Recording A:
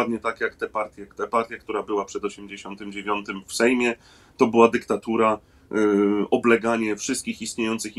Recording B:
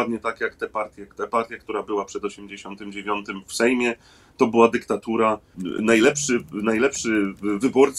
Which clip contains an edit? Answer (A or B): B